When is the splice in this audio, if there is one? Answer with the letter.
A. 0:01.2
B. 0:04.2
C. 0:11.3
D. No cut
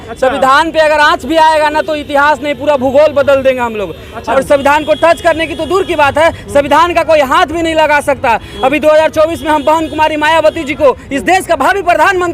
B